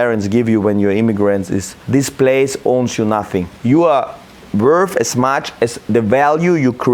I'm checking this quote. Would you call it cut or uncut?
cut